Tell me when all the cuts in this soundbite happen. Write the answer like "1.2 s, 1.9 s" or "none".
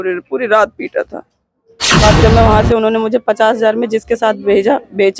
2.0 s